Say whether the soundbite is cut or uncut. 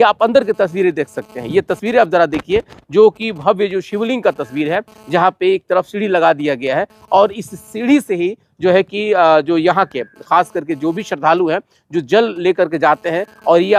uncut